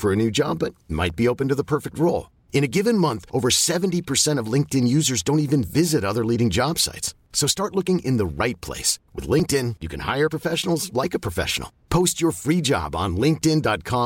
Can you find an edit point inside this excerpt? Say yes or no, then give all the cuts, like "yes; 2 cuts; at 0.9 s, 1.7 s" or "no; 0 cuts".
no; 0 cuts